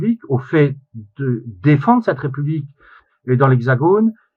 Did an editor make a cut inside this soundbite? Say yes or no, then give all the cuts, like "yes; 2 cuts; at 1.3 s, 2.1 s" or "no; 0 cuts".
no; 0 cuts